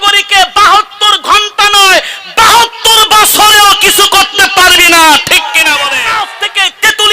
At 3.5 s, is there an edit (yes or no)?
no